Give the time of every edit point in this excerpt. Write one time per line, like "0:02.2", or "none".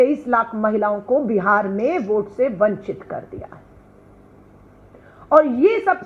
none